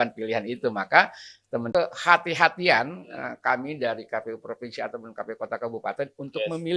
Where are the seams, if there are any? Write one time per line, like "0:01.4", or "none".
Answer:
0:01.7